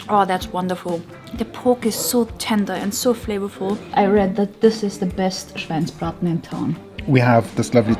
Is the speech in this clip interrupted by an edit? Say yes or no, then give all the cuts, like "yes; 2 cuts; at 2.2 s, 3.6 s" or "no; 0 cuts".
yes; 2 cuts; at 3.9 s, 6.9 s